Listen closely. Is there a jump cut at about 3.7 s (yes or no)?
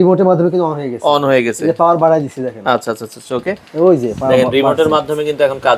no